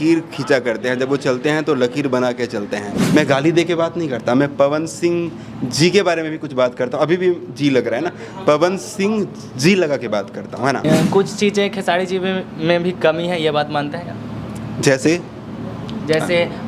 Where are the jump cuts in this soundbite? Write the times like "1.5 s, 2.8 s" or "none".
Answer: 3.0 s, 10.8 s